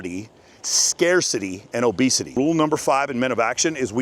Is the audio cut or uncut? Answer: cut